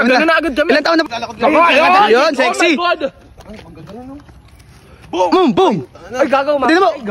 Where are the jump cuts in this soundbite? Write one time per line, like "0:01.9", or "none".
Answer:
0:01.0